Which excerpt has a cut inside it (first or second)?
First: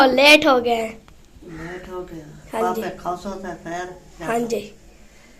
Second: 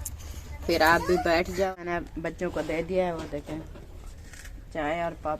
second